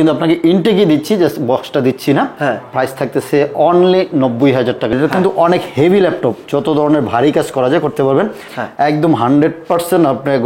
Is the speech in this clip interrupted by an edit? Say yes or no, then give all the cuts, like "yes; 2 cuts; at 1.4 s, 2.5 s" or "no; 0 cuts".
yes; 2 cuts; at 4.9 s, 8.5 s